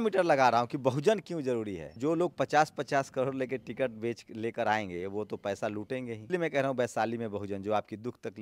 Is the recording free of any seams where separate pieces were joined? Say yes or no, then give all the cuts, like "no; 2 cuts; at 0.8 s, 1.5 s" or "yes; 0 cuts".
no; 2 cuts; at 2.0 s, 6.2 s